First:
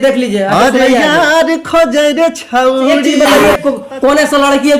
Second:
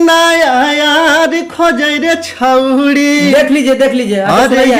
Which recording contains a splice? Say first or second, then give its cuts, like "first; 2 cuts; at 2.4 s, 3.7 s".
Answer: first; 1 cut; at 3.0 s